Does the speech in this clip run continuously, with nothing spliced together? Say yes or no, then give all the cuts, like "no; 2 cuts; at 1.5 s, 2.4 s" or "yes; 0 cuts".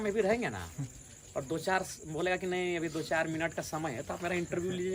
yes; 0 cuts